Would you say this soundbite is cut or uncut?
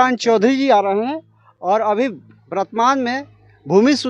uncut